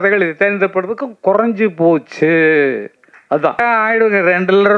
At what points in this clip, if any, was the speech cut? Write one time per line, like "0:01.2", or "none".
0:03.6